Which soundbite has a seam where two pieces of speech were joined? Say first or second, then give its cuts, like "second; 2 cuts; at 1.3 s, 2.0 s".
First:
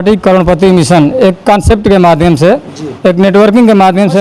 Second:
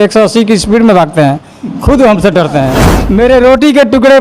second; 1 cut; at 2.9 s